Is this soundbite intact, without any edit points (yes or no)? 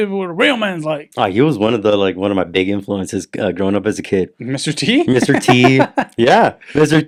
yes